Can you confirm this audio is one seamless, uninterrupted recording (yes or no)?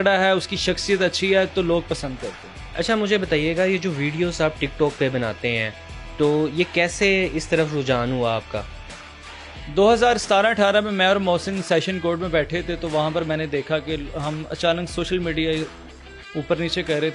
yes